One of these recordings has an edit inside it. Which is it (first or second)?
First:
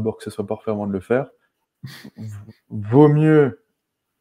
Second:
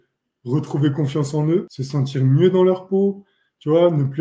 second